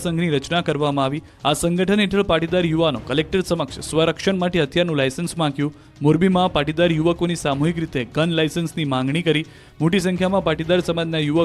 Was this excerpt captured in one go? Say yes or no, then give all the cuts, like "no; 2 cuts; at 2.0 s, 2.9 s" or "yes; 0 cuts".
yes; 0 cuts